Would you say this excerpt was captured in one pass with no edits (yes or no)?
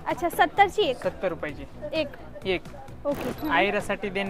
no